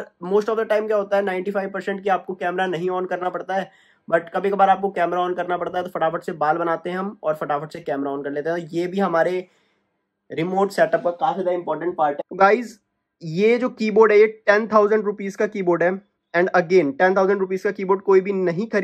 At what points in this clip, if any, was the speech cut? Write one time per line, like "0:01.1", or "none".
0:12.2